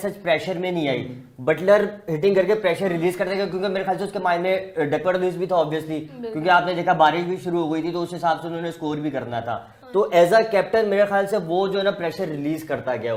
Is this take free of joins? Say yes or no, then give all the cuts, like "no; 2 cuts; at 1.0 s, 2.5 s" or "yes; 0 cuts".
yes; 0 cuts